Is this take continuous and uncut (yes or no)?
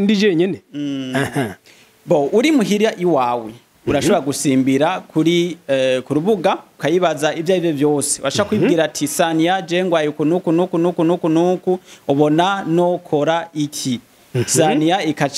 no